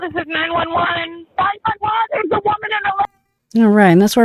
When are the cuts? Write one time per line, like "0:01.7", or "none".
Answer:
none